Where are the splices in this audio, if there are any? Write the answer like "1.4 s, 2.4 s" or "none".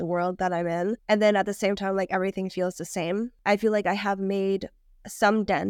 1.0 s, 3.3 s